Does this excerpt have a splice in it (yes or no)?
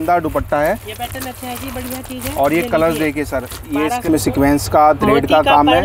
yes